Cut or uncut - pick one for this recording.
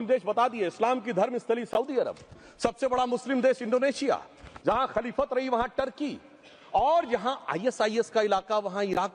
uncut